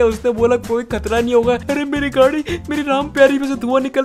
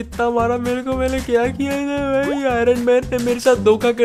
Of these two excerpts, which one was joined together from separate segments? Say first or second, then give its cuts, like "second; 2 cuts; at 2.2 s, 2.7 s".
first; 1 cut; at 1.6 s